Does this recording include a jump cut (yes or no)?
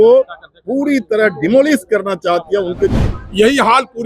yes